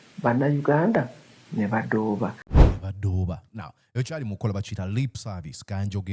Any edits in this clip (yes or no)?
yes